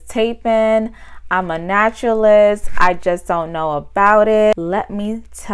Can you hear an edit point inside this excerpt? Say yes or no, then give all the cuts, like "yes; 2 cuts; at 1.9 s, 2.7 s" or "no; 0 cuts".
yes; 1 cut; at 4.5 s